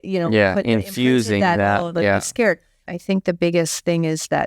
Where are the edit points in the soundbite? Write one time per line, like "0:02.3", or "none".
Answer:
0:02.8